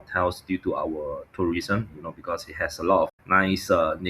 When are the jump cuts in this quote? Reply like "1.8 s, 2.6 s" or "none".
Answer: 3.1 s